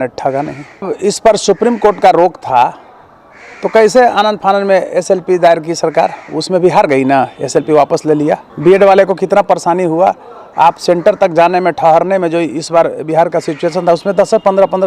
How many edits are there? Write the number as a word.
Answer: two